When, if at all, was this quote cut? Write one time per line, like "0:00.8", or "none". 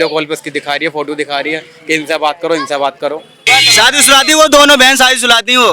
0:03.4